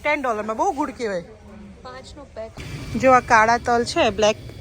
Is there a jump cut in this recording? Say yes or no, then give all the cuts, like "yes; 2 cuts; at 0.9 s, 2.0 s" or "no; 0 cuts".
yes; 1 cut; at 2.6 s